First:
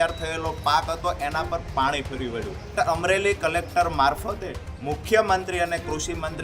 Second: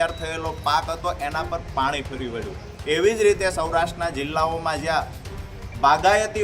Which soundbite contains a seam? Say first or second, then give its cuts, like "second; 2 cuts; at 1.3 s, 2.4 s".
first; 1 cut; at 2.7 s